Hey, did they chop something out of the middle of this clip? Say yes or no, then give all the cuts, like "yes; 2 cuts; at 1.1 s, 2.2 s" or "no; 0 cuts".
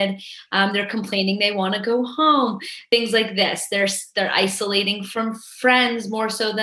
yes; 1 cut; at 2.7 s